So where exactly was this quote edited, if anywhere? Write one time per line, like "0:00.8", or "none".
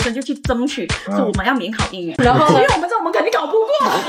none